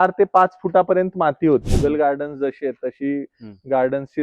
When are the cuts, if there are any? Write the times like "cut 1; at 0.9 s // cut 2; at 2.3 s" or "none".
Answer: cut 1; at 1.7 s